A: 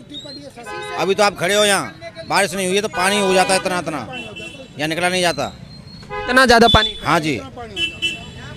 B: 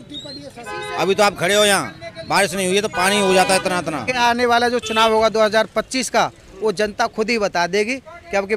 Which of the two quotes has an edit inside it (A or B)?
B